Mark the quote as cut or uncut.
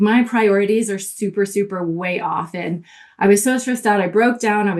uncut